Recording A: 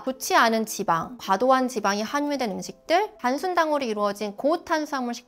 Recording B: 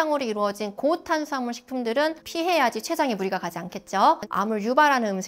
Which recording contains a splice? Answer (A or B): B